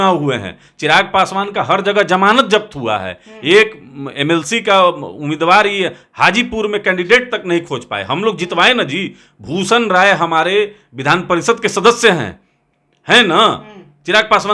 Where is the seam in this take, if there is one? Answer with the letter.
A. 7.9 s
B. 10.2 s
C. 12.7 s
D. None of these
D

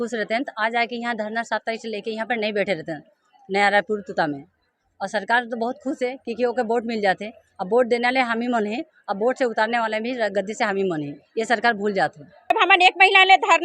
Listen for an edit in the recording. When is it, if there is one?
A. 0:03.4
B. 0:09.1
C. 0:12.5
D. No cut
C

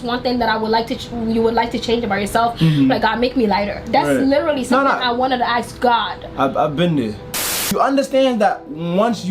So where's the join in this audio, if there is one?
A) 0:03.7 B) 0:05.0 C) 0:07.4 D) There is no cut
C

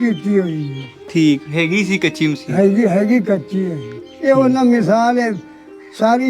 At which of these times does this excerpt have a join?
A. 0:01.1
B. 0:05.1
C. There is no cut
C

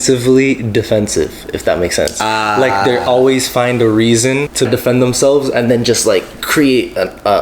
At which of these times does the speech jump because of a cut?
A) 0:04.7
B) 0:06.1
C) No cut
A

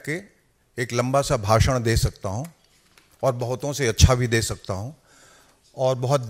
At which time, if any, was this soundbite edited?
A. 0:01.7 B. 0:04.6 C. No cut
C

